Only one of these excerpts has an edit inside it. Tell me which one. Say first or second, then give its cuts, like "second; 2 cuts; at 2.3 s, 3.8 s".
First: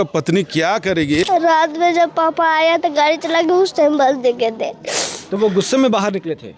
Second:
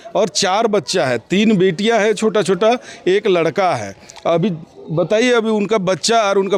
first; 1 cut; at 1.2 s